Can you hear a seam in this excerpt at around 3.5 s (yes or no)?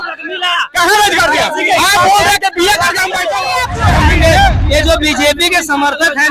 yes